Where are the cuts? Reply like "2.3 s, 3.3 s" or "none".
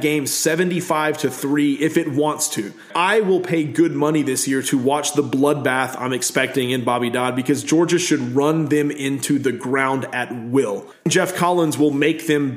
2.8 s, 11.1 s